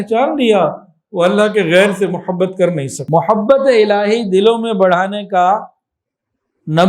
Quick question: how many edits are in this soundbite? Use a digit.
1